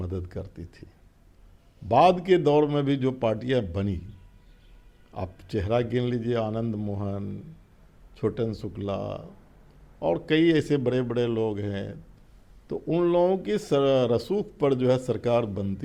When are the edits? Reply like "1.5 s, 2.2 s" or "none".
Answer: none